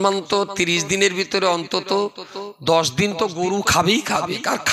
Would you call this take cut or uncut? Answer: uncut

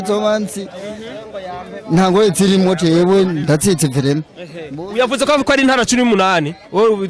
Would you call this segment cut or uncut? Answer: uncut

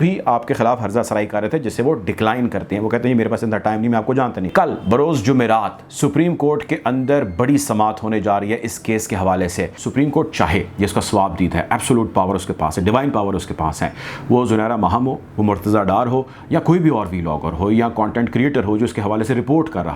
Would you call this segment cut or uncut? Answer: cut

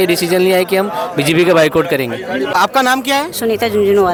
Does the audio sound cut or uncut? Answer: uncut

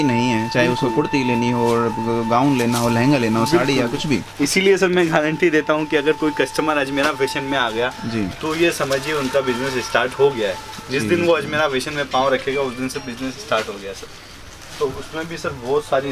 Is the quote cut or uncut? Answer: uncut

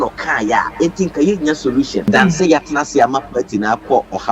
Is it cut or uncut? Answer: cut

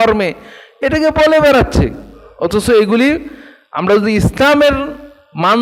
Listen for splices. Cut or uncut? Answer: uncut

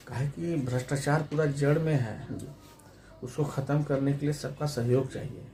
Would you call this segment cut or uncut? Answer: uncut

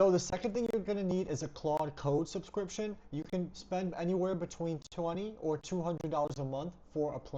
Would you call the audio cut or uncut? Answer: uncut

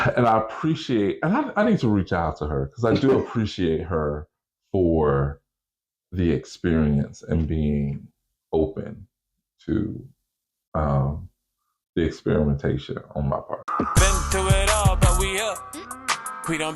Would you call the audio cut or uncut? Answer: cut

